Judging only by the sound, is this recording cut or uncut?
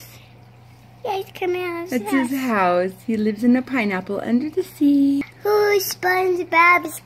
uncut